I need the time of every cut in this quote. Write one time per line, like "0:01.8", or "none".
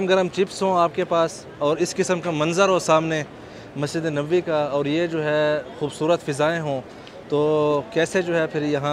none

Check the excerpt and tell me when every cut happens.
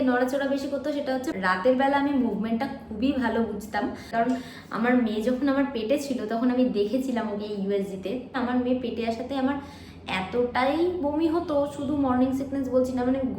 0:01.3
0:04.1
0:08.3

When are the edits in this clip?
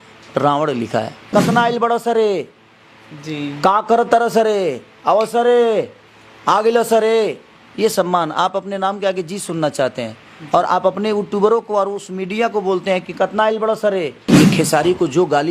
0:01.2
0:14.2

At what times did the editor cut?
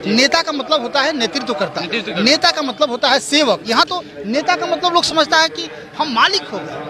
none

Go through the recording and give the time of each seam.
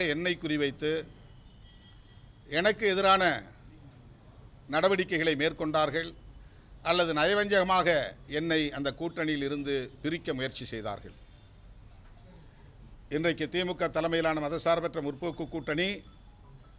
none

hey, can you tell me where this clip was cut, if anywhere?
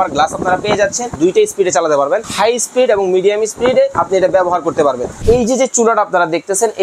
0:01.1
0:02.3
0:04.0
0:05.2

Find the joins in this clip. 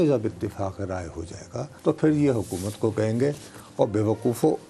0:01.7

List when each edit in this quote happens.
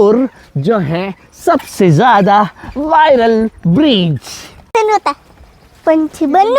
0:04.7

